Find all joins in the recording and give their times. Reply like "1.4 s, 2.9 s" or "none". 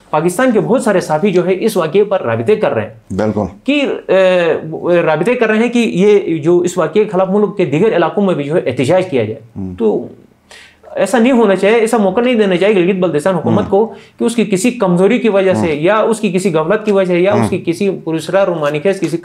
none